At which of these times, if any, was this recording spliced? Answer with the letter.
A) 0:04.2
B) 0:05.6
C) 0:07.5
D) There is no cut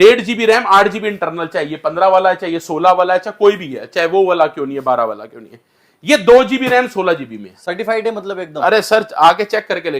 D